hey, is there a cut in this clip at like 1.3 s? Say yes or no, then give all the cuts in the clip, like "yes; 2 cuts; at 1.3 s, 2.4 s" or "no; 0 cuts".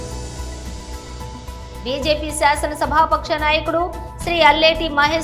yes; 1 cut; at 1.3 s